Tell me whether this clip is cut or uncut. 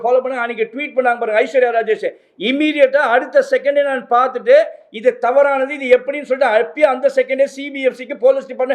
uncut